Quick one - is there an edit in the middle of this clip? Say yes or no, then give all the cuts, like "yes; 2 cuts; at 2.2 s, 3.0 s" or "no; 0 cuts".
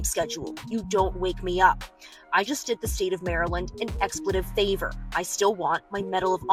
no; 0 cuts